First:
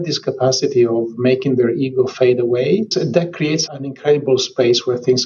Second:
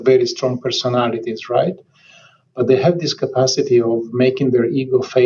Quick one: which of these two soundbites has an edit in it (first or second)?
first